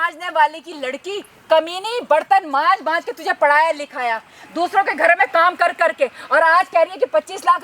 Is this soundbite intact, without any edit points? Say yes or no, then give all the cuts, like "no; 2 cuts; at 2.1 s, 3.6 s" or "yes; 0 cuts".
yes; 0 cuts